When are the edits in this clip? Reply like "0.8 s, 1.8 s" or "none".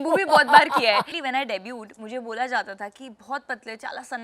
1.1 s

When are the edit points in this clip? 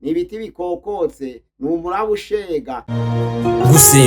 2.8 s

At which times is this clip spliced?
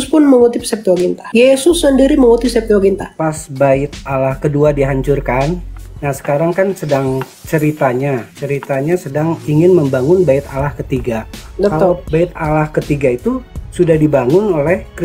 3.1 s, 12.0 s

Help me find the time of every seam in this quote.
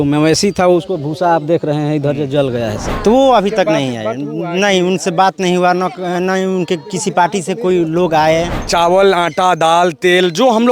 2.8 s, 8.6 s

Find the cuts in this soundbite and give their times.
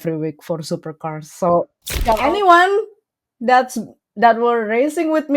2.2 s

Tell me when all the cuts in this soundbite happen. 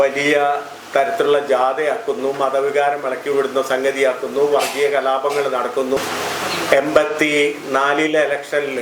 6.0 s

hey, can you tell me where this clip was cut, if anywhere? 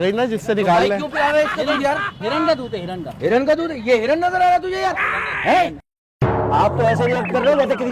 6.3 s

